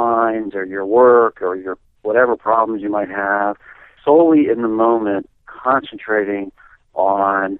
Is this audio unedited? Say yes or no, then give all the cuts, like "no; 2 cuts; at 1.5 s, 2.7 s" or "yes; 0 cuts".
no; 1 cut; at 3.9 s